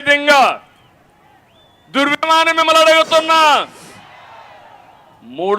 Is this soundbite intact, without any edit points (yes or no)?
no